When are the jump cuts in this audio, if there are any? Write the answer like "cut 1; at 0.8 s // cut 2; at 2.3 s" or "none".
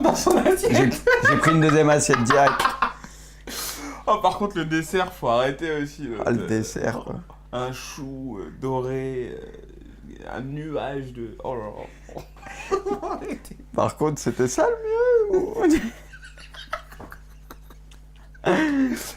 cut 1; at 3.4 s